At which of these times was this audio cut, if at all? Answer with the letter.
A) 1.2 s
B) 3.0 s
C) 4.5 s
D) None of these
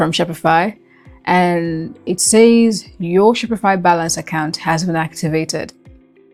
D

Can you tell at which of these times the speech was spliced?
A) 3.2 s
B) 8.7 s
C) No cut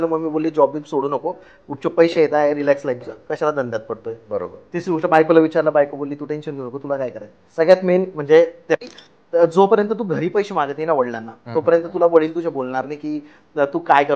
B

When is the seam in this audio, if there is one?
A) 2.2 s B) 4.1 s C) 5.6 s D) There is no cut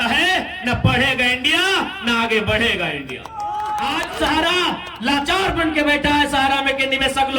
B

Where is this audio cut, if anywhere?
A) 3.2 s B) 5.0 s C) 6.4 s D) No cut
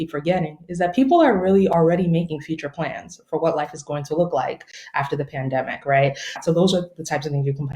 C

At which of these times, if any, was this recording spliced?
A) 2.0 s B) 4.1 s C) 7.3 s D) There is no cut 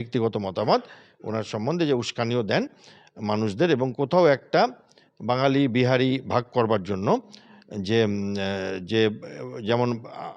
D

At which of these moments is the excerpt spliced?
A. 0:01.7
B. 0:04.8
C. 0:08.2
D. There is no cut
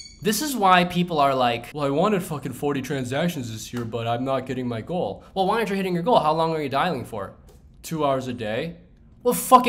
A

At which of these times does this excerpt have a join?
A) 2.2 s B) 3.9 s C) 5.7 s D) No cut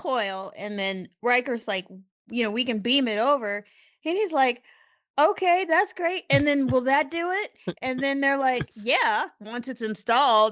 A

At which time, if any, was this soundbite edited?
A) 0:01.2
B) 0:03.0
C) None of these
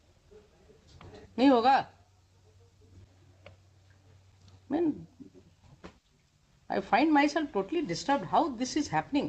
B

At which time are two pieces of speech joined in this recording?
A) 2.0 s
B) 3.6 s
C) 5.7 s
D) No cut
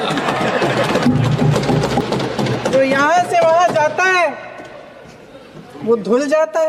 A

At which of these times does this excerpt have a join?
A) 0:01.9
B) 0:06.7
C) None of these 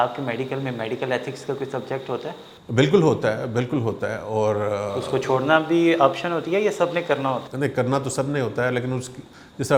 C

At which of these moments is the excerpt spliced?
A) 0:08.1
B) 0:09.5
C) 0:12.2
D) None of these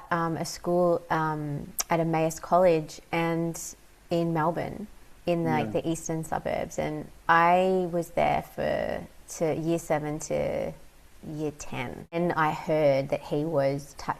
C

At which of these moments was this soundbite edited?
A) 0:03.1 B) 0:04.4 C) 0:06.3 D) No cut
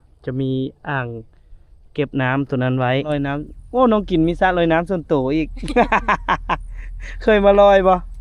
A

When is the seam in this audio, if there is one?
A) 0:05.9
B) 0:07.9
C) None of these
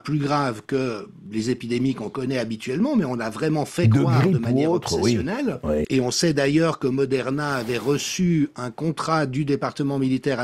A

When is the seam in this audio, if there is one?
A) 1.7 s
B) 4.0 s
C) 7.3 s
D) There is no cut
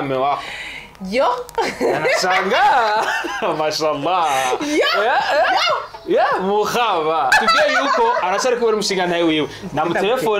C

